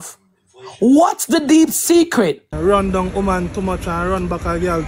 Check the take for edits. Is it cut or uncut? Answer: cut